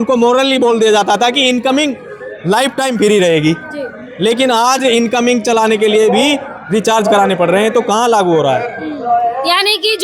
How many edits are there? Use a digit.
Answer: 0